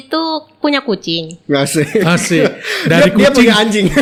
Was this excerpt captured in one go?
yes; 0 cuts

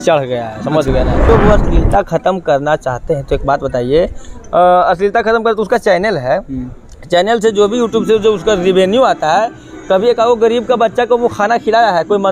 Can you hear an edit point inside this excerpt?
yes; 1 cut; at 1.3 s

